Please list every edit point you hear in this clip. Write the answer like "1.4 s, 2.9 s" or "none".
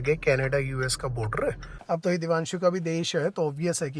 1.7 s

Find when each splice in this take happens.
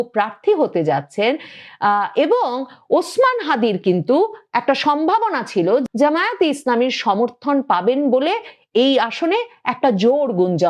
5.8 s

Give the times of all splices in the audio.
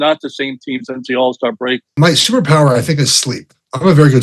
1.9 s

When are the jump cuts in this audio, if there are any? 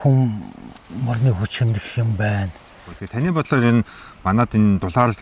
2.8 s

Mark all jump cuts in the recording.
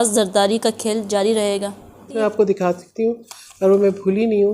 2.2 s

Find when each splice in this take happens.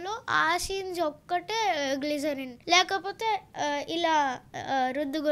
2.5 s

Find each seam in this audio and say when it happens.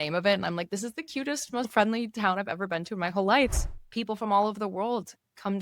1.7 s, 3.7 s

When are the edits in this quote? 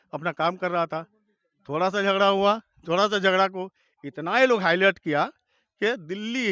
none

